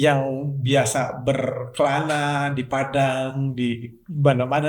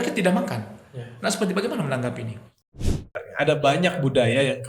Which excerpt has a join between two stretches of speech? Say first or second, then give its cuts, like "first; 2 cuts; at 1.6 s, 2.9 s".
second; 1 cut; at 2.9 s